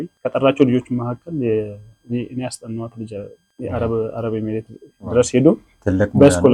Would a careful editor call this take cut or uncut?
uncut